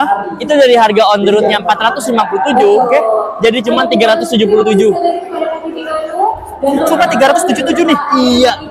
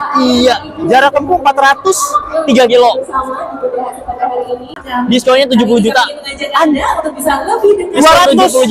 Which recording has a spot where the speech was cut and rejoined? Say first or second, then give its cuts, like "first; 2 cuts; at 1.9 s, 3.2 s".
second; 1 cut; at 4.8 s